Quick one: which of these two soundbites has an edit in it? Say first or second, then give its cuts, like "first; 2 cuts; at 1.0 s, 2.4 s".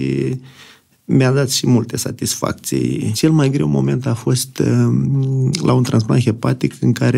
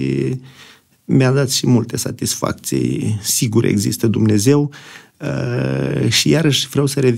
first; 1 cut; at 3.1 s